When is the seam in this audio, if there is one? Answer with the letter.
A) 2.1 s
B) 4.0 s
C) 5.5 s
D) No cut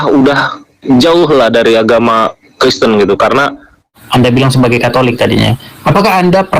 B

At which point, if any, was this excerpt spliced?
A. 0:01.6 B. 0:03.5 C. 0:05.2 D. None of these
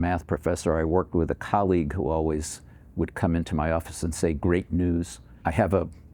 C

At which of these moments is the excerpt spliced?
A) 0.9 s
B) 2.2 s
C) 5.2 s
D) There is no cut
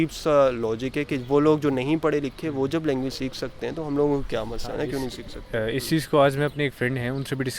D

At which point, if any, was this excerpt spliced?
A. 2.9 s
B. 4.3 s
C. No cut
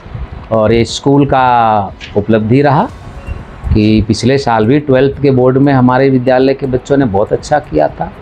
C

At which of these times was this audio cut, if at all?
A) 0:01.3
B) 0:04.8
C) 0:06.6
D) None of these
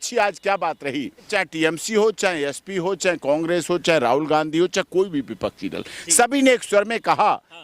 A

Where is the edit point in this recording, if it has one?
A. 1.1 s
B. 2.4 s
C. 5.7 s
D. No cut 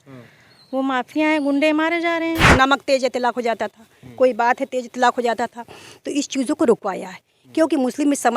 B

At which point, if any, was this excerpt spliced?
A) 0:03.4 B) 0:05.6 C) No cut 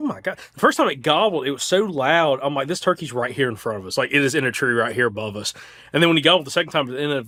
C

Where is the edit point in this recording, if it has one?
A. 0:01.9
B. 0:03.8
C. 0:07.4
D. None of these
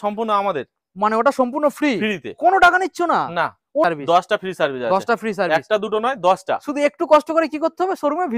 B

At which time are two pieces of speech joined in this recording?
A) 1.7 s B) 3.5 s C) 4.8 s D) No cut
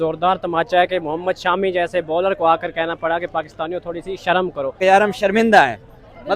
C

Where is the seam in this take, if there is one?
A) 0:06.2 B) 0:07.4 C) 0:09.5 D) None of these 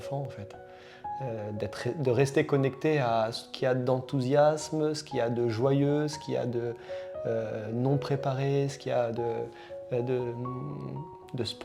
D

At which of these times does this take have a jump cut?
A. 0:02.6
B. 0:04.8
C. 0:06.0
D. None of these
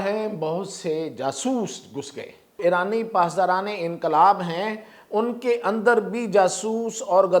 A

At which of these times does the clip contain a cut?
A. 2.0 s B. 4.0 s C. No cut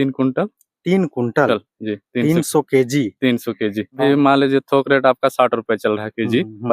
B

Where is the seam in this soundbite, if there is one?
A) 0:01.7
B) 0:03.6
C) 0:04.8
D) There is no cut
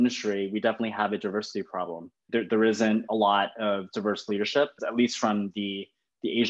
C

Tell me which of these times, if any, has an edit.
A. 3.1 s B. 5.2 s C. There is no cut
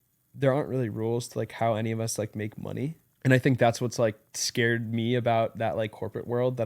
A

